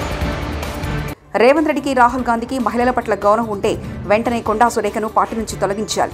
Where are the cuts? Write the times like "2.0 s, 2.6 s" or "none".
1.2 s